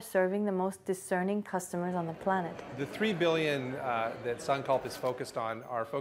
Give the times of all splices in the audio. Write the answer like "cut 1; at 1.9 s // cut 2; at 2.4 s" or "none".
cut 1; at 2.6 s